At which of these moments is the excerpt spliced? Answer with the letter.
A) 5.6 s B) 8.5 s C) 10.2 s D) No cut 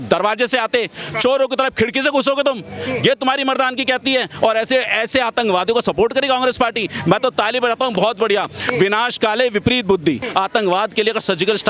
C